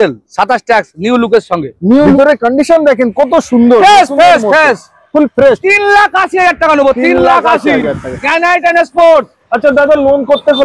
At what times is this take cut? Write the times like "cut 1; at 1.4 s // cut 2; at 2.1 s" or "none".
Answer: cut 1; at 2.2 s